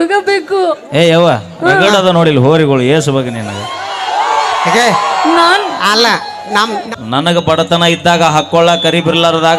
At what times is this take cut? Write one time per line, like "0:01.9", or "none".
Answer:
0:06.8